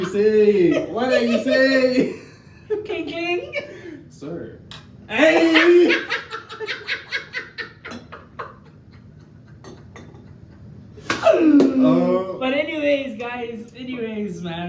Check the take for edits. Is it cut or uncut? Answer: uncut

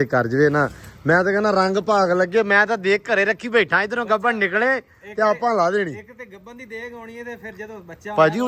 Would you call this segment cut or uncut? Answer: uncut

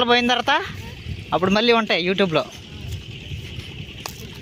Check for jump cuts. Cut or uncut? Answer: uncut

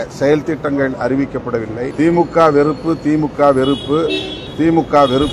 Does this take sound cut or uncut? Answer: cut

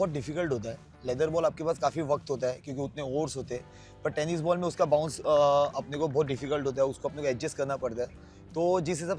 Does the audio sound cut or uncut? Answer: uncut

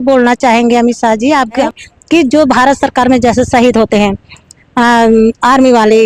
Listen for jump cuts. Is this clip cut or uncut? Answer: cut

